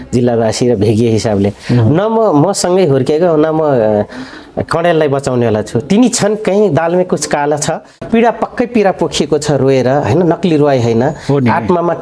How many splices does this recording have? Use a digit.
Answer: 1